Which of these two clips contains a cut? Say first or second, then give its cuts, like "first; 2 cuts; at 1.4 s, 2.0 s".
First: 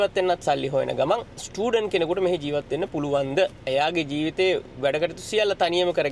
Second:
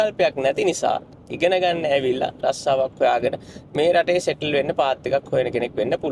first; 2 cuts; at 1.4 s, 3.7 s